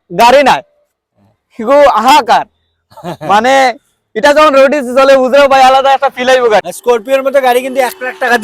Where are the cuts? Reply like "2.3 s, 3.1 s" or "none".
6.7 s